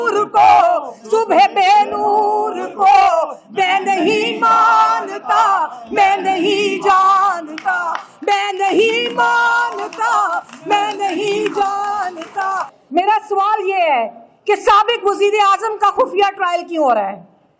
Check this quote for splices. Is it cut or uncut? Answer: cut